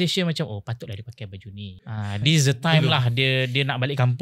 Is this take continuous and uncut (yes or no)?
no